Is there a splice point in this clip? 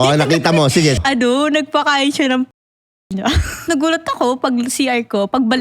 yes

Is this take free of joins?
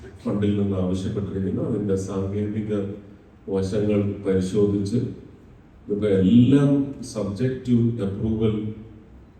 yes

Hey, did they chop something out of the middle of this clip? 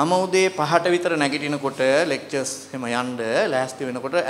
no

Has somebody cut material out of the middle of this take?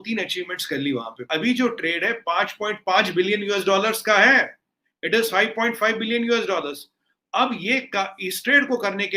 yes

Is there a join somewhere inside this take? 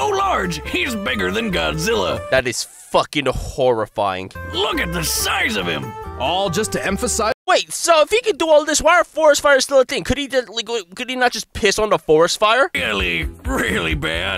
yes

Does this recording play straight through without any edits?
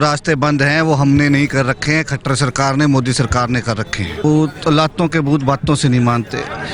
no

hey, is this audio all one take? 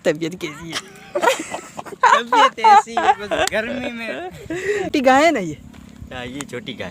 no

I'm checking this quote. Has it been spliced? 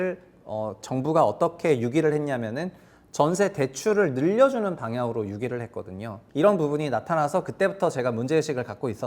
yes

